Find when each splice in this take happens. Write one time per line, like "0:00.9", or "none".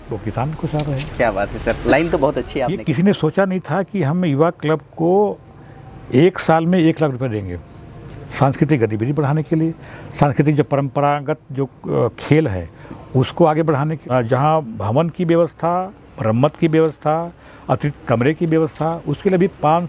0:02.8
0:14.0